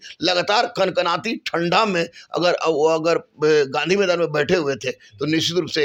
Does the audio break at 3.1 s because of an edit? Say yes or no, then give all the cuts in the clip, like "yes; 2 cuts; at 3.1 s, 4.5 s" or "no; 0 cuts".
no; 0 cuts